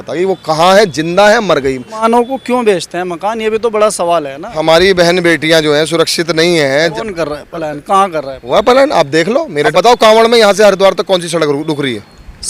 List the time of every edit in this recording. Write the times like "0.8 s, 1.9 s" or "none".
2.0 s, 4.6 s, 6.9 s, 9.7 s